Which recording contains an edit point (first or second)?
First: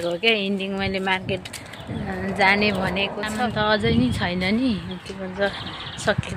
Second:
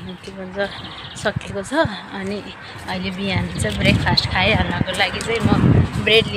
first